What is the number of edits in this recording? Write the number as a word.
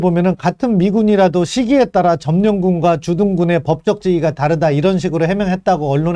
zero